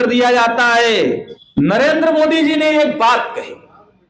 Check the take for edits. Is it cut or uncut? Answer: cut